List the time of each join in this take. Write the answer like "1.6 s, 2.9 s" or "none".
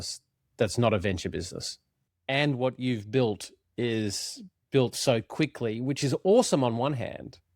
2.1 s